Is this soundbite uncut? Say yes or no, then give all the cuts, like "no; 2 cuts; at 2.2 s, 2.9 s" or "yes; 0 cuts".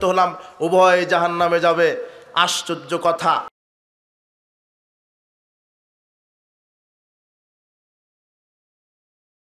yes; 0 cuts